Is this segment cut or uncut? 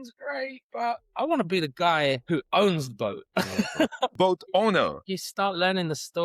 cut